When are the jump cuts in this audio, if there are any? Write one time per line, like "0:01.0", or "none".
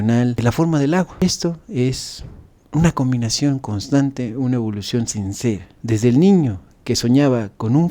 0:01.2